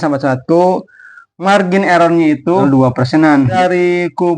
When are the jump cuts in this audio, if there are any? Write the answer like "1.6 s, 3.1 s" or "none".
2.6 s, 3.5 s